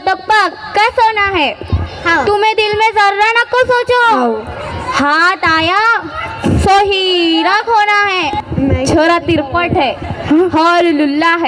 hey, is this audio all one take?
no; 1 cut; at 8.4 s

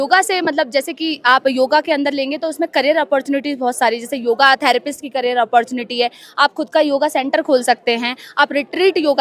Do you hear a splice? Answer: no; 0 cuts

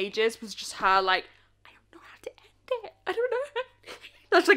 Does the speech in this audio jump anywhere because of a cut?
no; 0 cuts

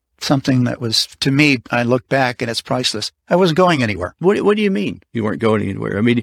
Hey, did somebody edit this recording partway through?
yes; 1 cut; at 4.1 s

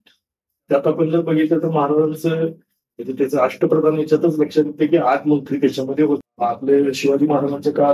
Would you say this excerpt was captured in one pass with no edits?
no; 1 cut; at 6.3 s

